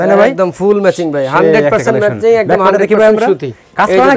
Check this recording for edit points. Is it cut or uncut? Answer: uncut